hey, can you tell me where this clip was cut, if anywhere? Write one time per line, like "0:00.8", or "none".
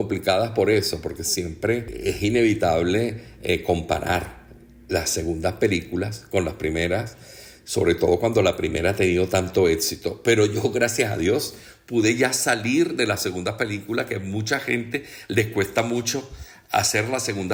none